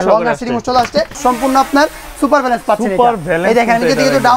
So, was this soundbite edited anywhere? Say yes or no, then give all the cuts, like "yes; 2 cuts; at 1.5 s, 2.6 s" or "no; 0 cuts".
yes; 1 cut; at 1.2 s